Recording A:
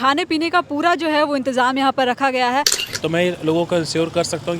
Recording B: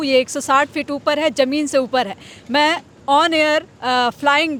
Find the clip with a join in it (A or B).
A